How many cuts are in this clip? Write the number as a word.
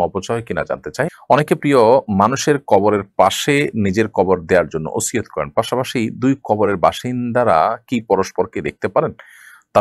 one